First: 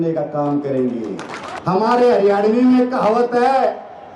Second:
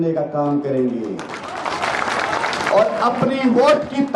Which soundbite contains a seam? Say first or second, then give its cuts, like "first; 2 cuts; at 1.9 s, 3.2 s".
first; 1 cut; at 1.6 s